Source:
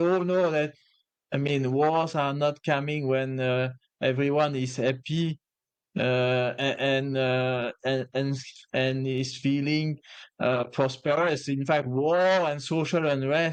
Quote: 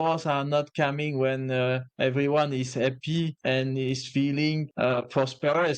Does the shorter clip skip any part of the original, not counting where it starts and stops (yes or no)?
yes